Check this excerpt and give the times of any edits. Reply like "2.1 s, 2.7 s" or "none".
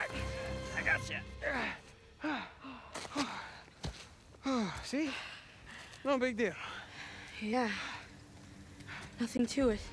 none

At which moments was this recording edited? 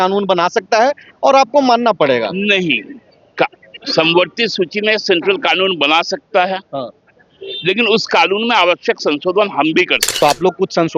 10.1 s

